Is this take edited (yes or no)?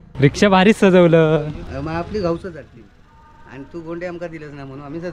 yes